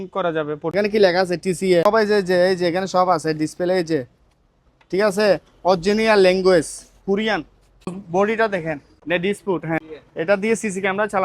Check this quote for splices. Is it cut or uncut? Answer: cut